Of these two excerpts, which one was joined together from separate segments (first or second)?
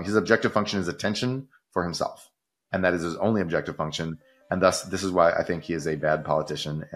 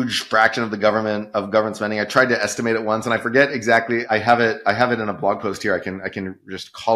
second